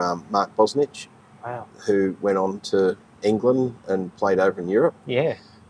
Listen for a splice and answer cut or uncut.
uncut